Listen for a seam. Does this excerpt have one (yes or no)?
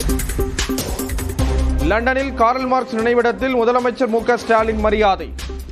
yes